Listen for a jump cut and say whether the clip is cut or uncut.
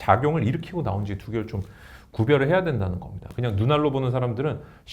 cut